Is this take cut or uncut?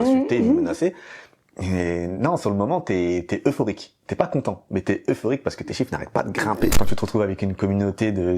cut